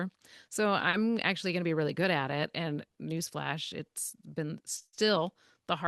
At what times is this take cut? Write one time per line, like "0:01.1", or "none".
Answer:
none